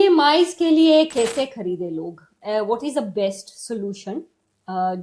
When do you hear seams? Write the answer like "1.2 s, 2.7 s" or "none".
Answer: none